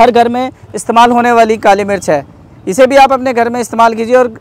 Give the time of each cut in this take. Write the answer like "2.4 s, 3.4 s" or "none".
none